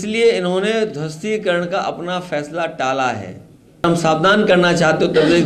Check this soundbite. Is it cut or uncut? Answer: cut